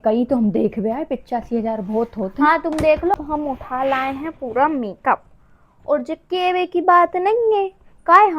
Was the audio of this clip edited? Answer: yes; 1 cut; at 3.1 s

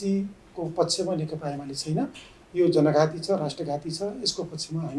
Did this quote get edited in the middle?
no; 0 cuts

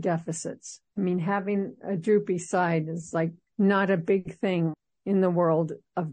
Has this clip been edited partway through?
yes; 1 cut; at 3.4 s

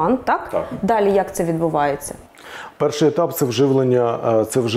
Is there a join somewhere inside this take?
no; 0 cuts

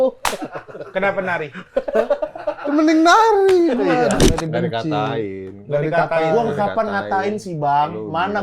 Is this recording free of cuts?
no; 1 cut; at 4.2 s

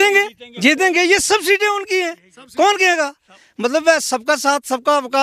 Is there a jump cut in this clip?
no; 0 cuts

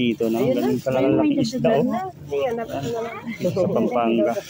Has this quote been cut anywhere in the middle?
no; 0 cuts

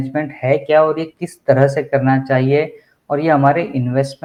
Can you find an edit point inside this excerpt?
no; 0 cuts

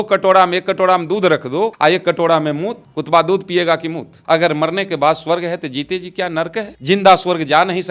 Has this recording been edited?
yes; 2 cuts; at 1.7 s, 4.2 s

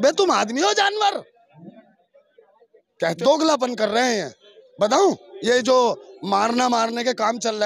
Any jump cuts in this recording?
yes; 1 cut; at 3.2 s

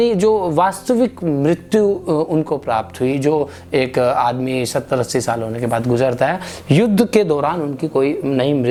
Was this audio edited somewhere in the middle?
no; 0 cuts

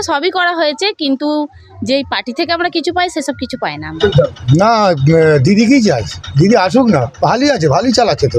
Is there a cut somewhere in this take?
yes; 1 cut; at 4.0 s

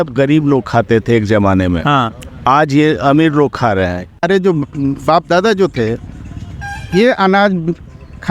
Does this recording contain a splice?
yes; 1 cut; at 4.2 s

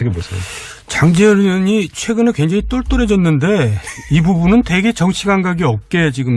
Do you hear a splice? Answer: no; 0 cuts

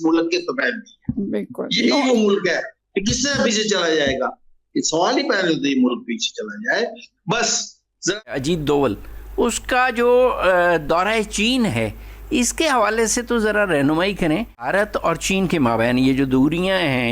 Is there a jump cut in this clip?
yes; 2 cuts; at 8.3 s, 14.7 s

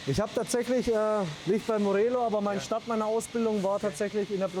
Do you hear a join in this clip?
yes; 1 cut; at 1.3 s

